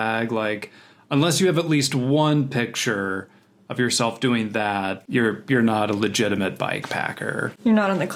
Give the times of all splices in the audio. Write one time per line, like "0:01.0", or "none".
none